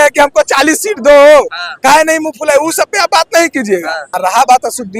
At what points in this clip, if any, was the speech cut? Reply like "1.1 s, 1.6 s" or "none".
4.0 s